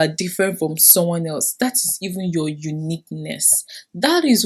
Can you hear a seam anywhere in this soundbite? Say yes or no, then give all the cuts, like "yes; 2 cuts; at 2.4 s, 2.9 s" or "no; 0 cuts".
no; 0 cuts